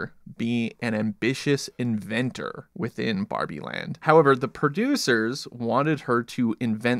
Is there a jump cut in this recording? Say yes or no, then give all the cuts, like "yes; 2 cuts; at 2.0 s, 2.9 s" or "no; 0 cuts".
yes; 2 cuts; at 2.6 s, 4.0 s